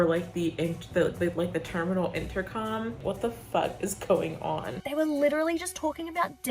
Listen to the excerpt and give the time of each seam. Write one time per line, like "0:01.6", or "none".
0:03.0
0:04.8